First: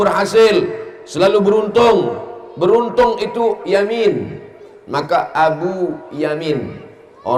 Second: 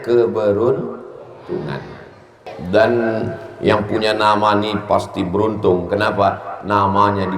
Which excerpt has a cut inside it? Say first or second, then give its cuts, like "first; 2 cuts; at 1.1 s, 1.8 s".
second; 1 cut; at 2.5 s